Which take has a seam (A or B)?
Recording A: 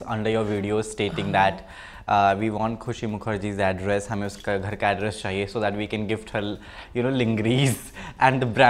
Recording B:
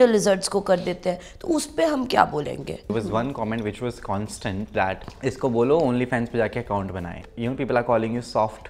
B